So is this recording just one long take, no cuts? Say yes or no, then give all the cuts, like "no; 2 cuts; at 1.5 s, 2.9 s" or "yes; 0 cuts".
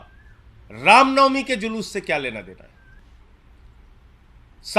no; 1 cut; at 3.0 s